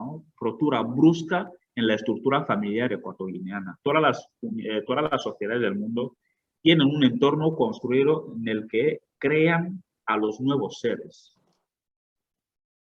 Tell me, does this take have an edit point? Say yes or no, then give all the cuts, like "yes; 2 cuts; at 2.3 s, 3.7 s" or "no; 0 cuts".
no; 0 cuts